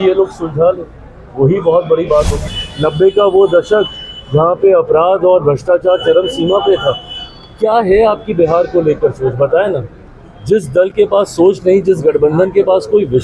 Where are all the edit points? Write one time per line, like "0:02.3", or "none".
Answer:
0:02.4